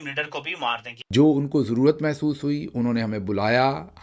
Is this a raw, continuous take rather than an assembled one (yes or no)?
no